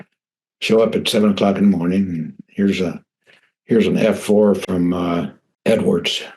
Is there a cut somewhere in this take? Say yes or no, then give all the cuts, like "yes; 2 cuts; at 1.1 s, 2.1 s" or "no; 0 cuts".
yes; 1 cut; at 5.4 s